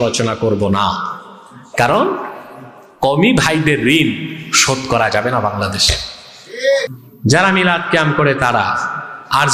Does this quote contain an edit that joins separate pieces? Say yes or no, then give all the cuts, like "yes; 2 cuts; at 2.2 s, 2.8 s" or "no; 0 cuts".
yes; 1 cut; at 7.0 s